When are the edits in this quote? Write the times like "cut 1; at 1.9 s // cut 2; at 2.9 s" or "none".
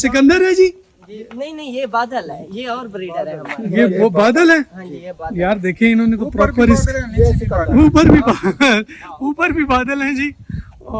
none